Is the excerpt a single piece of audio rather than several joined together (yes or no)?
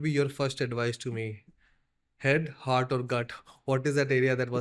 yes